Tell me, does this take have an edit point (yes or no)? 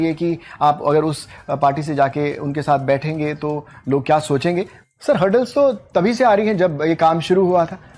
yes